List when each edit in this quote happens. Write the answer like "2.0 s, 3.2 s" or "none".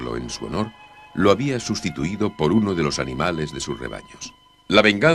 none